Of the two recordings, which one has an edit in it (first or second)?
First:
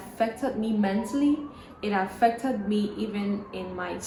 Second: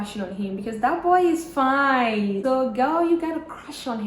second